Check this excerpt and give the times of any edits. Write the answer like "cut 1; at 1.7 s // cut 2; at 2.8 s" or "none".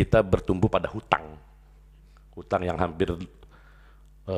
none